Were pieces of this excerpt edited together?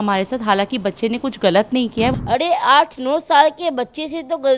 yes; 1 cut; at 2.1 s

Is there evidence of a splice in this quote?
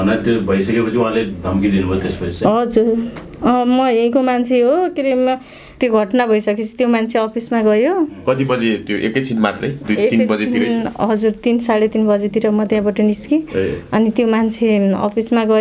yes; 1 cut; at 5.7 s

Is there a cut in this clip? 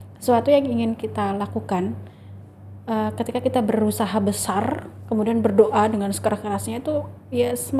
no; 0 cuts

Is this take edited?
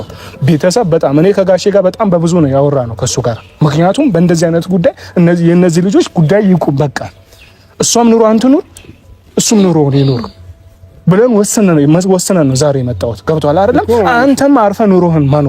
no; 0 cuts

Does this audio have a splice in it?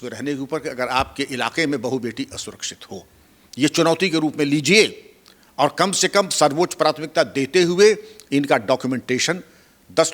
no; 0 cuts

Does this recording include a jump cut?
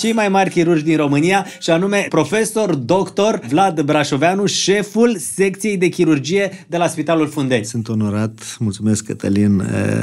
yes; 3 cuts; at 2.1 s, 3.5 s, 7.7 s

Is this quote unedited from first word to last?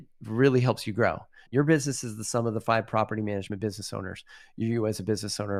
yes; 0 cuts

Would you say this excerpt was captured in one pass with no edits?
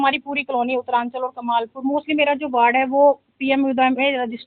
yes; 0 cuts

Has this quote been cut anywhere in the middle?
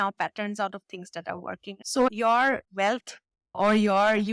yes; 1 cut; at 1.7 s

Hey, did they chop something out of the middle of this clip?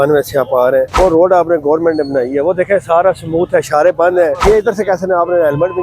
yes; 2 cuts; at 0.9 s, 4.4 s

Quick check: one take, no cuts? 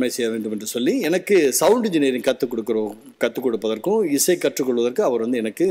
yes; 0 cuts

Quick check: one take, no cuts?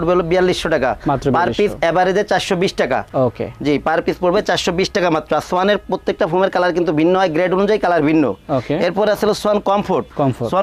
yes; 0 cuts

